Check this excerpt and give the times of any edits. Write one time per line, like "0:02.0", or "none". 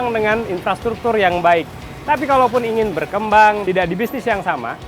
0:03.6